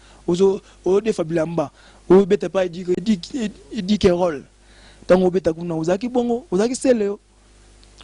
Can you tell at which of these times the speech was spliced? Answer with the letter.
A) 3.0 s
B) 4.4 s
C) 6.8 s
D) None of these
A